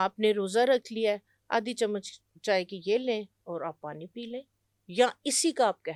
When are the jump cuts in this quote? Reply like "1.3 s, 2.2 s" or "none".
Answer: none